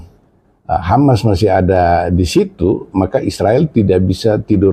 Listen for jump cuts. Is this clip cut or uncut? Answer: uncut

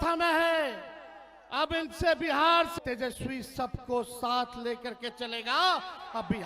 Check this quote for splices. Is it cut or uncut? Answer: cut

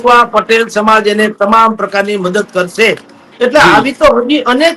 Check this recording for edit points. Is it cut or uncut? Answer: uncut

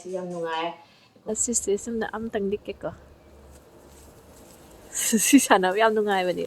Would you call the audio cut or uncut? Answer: cut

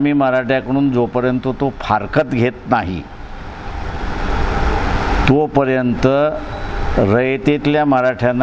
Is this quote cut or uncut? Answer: uncut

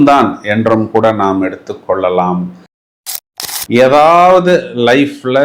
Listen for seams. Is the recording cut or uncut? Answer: cut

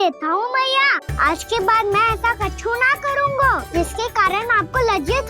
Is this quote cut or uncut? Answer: cut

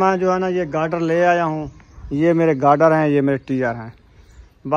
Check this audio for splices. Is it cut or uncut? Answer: uncut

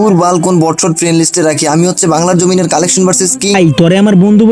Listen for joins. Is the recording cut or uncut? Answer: cut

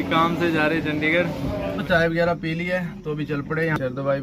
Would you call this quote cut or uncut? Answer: cut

